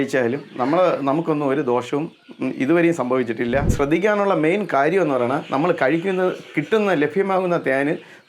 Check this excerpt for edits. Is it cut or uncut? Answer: cut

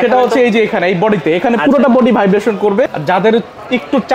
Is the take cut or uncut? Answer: cut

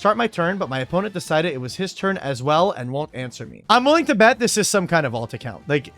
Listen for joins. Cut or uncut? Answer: cut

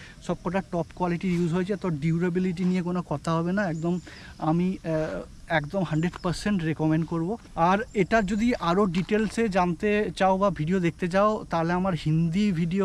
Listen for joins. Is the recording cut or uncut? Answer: uncut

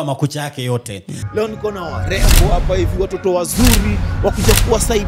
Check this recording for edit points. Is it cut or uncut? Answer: cut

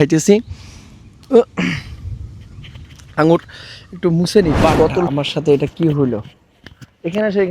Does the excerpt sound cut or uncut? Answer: cut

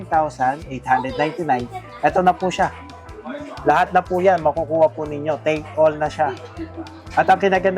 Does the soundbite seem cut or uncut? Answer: uncut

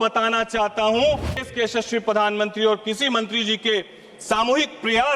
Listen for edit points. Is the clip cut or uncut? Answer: cut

